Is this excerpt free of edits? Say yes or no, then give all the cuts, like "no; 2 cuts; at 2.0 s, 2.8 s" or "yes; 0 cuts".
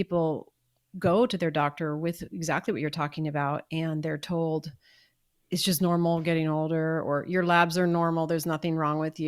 yes; 0 cuts